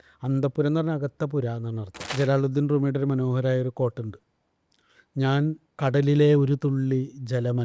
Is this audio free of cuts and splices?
no; 2 cuts; at 2.0 s, 5.7 s

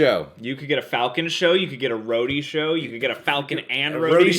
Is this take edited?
no; 0 cuts

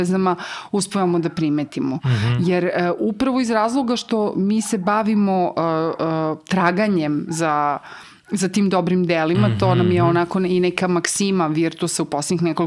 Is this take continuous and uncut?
yes; 0 cuts

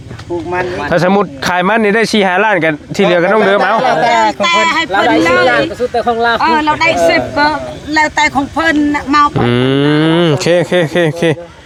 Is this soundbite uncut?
yes; 0 cuts

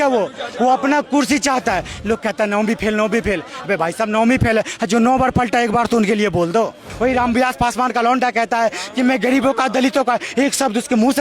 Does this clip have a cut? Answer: yes; 1 cut; at 6.8 s

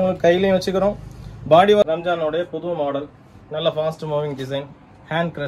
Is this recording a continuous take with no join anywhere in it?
no; 1 cut; at 1.8 s

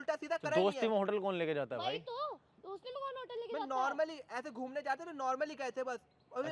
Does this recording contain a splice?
no; 0 cuts

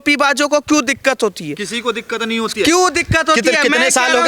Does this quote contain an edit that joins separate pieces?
no; 0 cuts

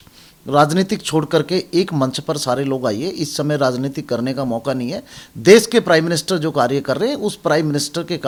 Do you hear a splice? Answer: no; 0 cuts

